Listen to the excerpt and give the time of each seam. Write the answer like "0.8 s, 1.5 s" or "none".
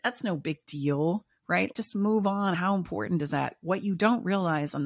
none